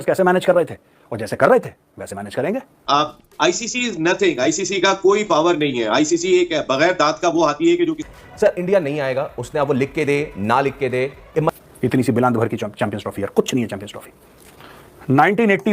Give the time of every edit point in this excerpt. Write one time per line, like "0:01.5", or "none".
0:02.8
0:08.0
0:11.6